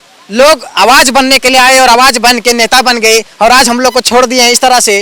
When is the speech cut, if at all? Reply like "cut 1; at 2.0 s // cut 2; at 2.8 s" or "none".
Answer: none